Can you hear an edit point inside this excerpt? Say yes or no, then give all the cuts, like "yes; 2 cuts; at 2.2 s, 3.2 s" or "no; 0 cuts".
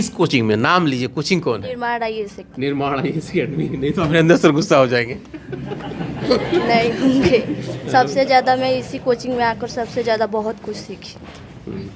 no; 0 cuts